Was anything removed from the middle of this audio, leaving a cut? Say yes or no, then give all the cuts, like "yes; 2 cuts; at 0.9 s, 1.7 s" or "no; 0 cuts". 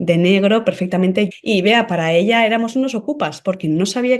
yes; 1 cut; at 1.3 s